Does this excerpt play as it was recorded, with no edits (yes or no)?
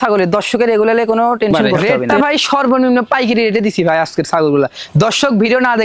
no